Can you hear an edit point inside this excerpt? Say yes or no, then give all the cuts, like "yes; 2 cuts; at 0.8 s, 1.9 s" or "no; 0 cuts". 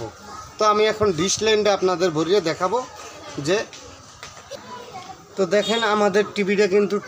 no; 0 cuts